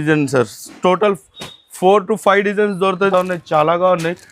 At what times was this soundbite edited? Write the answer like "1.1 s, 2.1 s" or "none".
3.1 s